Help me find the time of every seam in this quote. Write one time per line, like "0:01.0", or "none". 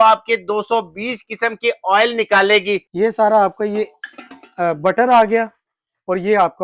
0:02.9